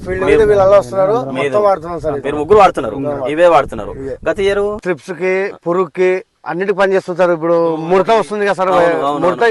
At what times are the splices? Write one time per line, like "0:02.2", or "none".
0:04.8